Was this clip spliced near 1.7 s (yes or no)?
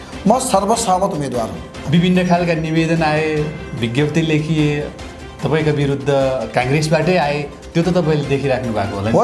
yes